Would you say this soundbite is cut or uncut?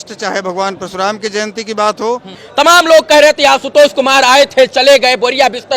cut